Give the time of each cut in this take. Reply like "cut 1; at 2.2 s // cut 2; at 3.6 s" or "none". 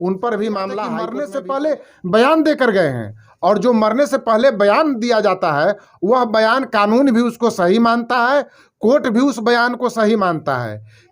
cut 1; at 1.1 s